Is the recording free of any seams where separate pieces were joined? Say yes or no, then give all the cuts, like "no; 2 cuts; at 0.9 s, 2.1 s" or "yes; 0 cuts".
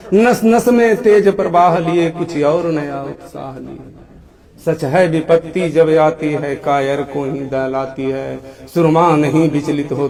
yes; 0 cuts